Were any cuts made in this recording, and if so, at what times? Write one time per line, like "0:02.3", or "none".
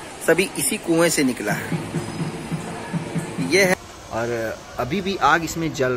0:03.7